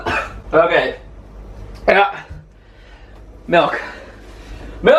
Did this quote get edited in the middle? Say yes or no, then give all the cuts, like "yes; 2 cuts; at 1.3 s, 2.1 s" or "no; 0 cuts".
no; 0 cuts